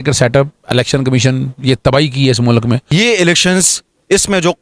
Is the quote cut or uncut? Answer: cut